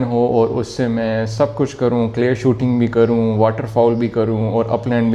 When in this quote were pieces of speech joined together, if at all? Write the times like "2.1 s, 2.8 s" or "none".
none